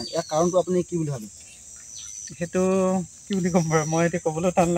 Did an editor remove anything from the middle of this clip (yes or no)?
no